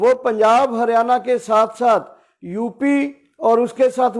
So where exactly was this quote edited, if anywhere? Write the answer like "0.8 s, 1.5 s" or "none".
none